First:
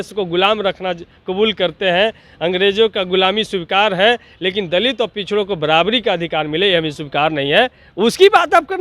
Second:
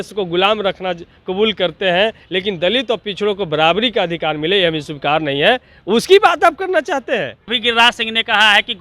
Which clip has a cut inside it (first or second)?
second